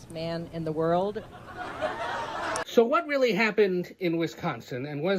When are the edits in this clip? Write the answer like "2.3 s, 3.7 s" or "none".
2.6 s